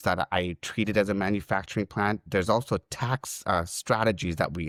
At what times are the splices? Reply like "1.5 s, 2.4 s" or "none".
none